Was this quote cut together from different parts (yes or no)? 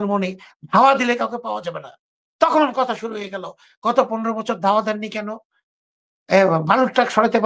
no